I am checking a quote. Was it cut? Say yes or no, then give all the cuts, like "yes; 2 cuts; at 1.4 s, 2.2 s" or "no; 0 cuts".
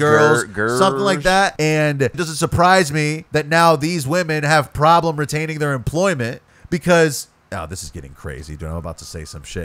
yes; 4 cuts; at 1.5 s, 2.2 s, 3.2 s, 6.5 s